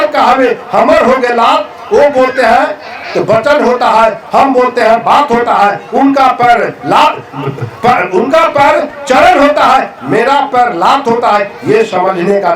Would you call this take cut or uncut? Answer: uncut